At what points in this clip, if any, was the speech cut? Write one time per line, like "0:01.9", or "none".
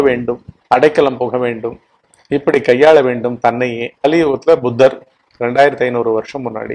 0:03.9